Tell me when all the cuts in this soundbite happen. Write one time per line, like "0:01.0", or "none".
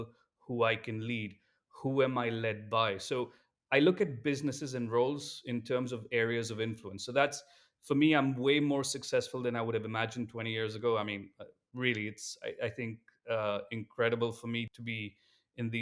0:14.8